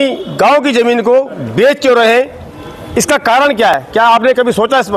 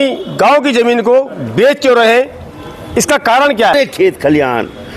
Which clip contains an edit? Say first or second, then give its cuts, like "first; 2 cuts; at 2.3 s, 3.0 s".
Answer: second; 1 cut; at 3.7 s